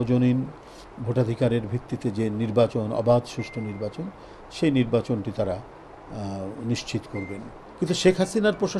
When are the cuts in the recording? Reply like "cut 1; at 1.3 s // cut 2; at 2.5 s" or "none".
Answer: cut 1; at 7.6 s